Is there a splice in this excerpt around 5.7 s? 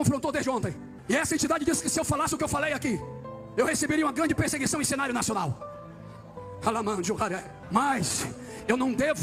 no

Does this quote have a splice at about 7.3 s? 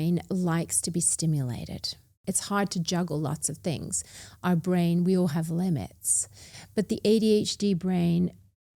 no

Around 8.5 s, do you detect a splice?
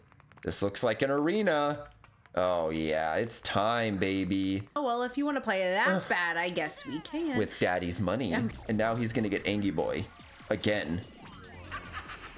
yes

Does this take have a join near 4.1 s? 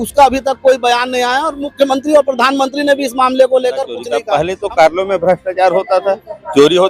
yes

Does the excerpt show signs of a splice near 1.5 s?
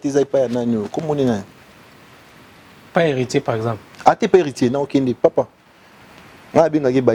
no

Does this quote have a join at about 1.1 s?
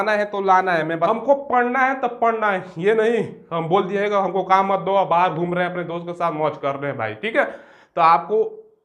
yes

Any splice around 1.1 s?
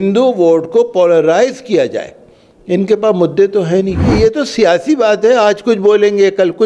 no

